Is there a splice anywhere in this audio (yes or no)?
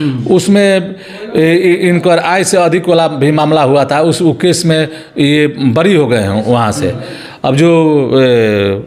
no